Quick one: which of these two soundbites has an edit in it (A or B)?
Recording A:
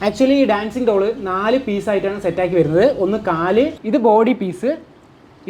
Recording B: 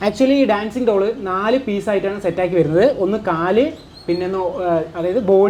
A